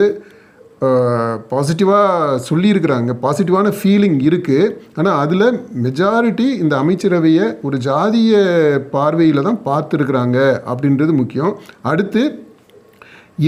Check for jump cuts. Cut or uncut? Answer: uncut